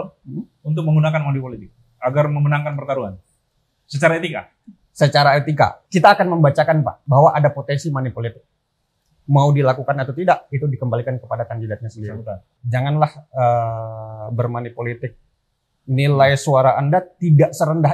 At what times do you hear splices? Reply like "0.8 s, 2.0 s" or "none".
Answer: 5.8 s, 7.0 s, 12.5 s